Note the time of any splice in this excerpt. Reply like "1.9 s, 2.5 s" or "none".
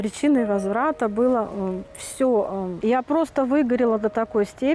2.7 s